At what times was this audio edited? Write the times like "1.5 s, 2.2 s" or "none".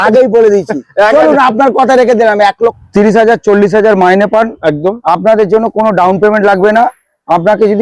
2.8 s

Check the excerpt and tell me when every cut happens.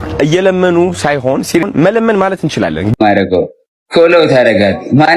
1.6 s, 2.9 s

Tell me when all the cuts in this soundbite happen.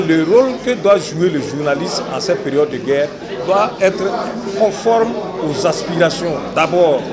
none

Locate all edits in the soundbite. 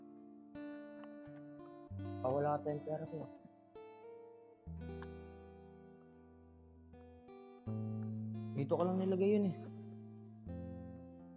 2.2 s, 3.3 s, 8.5 s, 9.5 s

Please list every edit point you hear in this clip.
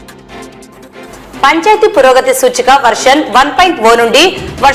none

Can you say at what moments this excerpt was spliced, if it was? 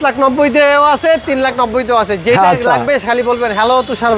none

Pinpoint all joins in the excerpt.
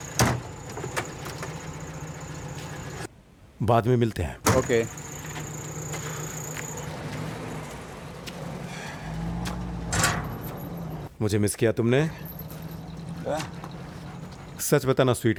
none

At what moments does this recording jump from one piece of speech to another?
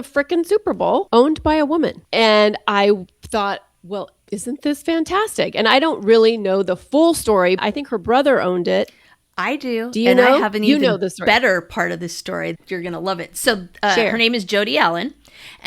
1.1 s, 2.0 s, 7.6 s, 12.6 s

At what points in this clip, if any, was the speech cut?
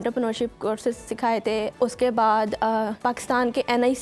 1.7 s, 2.9 s

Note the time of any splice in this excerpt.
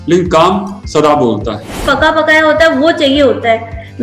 1.8 s

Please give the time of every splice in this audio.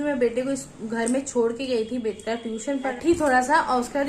2.9 s

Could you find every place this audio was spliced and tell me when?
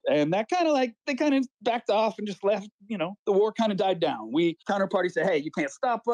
1.0 s, 4.6 s

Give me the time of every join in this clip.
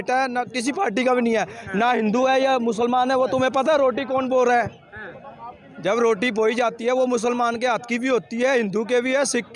none

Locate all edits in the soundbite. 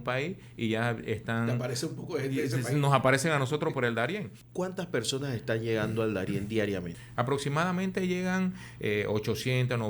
4.4 s, 7.0 s

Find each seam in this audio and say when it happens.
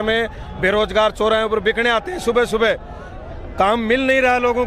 none

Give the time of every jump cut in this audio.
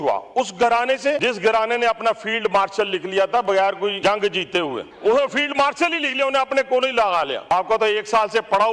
1.2 s, 4.0 s, 4.9 s, 7.5 s

